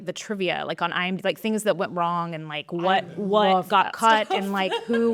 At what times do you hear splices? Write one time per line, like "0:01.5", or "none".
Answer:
none